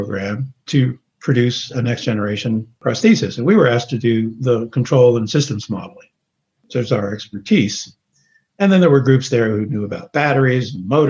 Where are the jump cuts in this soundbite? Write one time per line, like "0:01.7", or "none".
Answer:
0:01.1
0:02.7